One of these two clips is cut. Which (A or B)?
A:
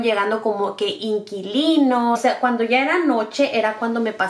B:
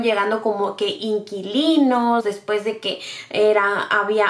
A